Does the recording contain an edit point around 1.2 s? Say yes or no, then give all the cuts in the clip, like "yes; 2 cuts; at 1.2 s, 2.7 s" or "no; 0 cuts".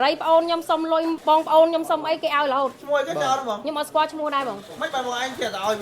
yes; 1 cut; at 1.2 s